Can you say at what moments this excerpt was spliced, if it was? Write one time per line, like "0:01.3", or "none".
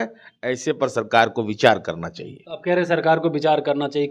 none